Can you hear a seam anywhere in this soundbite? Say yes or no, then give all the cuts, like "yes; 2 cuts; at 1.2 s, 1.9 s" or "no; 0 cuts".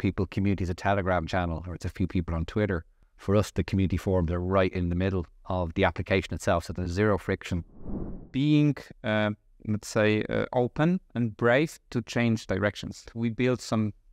yes; 2 cuts; at 8.1 s, 13.1 s